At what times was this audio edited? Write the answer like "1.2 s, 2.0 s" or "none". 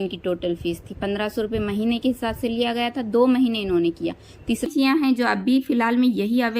4.7 s